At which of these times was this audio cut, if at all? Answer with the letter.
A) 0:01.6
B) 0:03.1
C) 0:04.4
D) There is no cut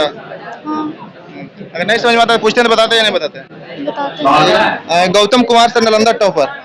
C